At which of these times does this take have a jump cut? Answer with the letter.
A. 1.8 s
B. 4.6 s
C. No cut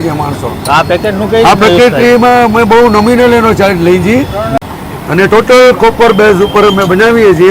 B